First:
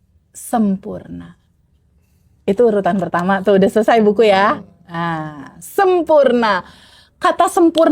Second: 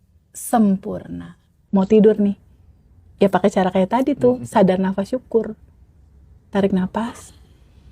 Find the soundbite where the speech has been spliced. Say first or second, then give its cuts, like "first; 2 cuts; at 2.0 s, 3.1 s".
second; 1 cut; at 1.6 s